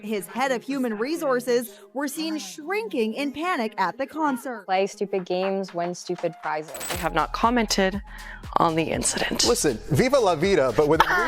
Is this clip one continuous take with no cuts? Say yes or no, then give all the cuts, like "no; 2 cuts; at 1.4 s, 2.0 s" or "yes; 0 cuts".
no; 1 cut; at 6.8 s